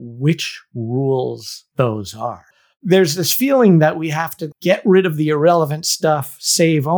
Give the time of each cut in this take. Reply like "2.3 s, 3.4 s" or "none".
2.5 s, 4.4 s